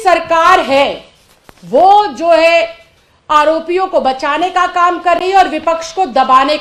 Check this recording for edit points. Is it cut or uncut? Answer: uncut